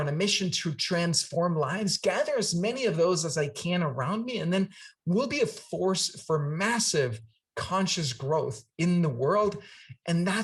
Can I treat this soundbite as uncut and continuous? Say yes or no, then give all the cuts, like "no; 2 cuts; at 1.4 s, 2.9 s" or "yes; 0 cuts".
yes; 0 cuts